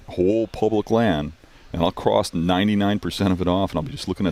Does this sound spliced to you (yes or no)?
no